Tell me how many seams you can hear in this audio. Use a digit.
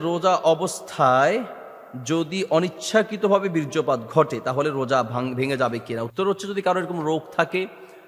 0